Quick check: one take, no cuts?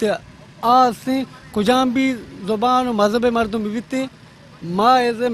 yes; 0 cuts

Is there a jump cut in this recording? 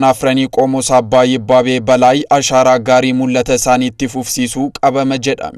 no; 0 cuts

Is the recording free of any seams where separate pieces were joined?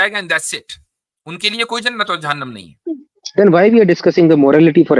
yes; 0 cuts

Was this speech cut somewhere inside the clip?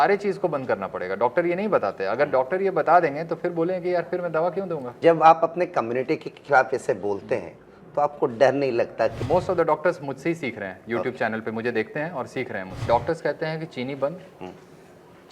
yes; 3 cuts; at 4.9 s, 9.2 s, 12.8 s

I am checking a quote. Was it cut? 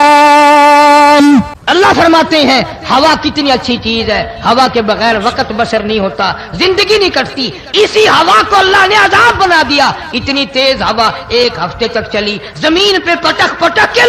yes; 1 cut; at 1.4 s

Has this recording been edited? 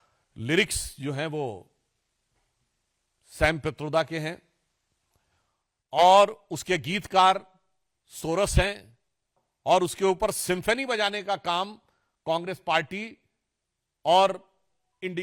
no; 0 cuts

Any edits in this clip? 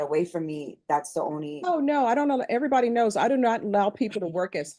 yes; 1 cut; at 1.2 s

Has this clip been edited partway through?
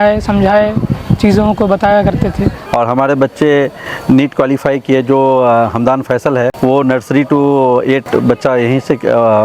yes; 3 cuts; at 2.6 s, 6.5 s, 8.0 s

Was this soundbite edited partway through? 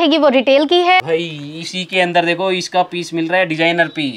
yes; 1 cut; at 1.0 s

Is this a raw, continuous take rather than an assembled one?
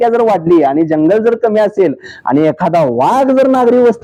yes; 0 cuts

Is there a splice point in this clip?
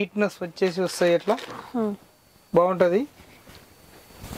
no; 0 cuts

